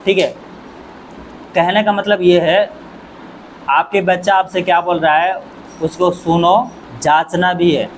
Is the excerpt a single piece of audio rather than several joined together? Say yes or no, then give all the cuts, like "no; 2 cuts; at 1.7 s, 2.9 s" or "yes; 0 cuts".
yes; 0 cuts